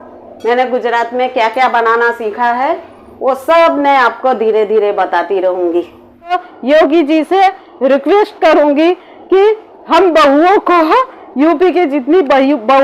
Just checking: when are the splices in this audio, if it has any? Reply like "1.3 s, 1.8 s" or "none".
6.5 s